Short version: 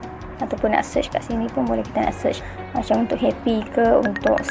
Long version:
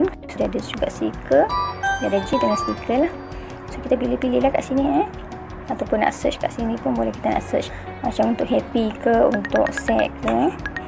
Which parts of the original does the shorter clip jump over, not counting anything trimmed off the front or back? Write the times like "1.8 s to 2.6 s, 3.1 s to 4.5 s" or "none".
none

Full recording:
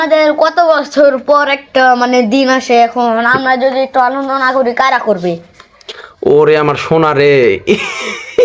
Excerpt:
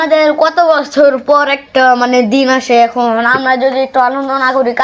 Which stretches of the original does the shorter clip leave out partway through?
none

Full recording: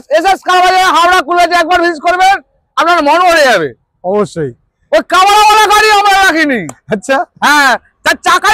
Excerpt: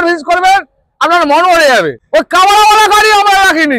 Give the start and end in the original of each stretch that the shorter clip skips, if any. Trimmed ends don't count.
3.7 s to 4.8 s

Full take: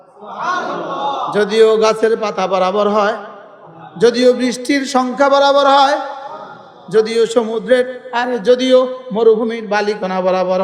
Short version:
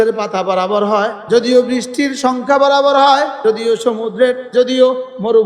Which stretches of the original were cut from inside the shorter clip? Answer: 3.2 s to 3.9 s, 6.1 s to 6.9 s, 8.0 s to 8.4 s

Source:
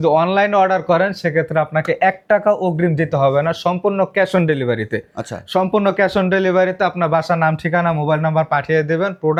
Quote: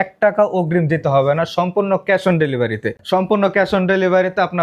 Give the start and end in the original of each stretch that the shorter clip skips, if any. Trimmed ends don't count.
5.0 s to 5.4 s

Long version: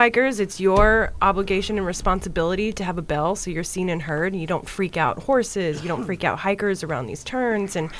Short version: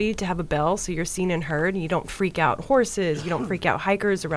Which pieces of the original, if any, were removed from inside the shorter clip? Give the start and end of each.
none

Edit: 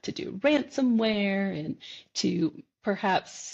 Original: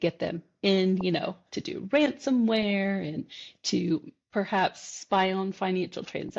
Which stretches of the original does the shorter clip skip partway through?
none

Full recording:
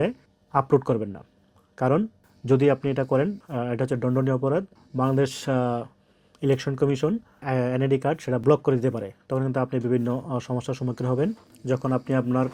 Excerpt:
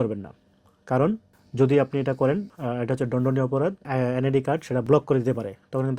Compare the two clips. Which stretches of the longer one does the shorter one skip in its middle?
4.7 s to 7.4 s

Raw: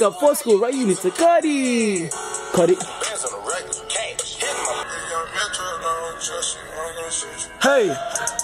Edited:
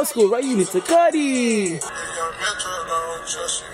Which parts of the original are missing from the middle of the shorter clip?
2.3 s to 4.9 s

